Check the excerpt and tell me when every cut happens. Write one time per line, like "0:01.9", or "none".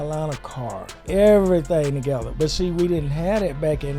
0:01.0